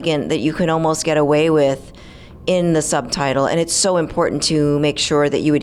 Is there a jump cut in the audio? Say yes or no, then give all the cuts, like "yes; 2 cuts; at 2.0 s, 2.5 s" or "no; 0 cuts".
no; 0 cuts